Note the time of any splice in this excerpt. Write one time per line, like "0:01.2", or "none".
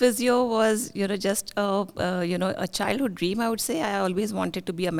none